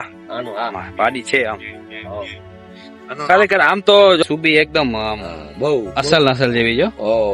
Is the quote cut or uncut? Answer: cut